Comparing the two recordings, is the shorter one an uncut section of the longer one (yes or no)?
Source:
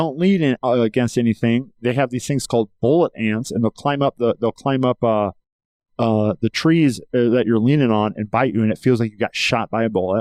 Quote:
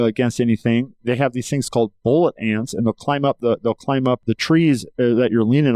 no